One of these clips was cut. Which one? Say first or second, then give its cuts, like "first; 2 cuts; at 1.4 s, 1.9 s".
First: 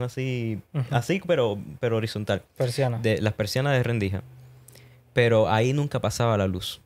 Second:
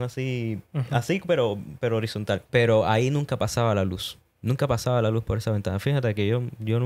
second; 1 cut; at 2.4 s